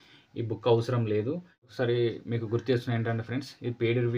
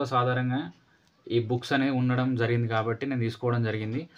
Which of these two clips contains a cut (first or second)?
first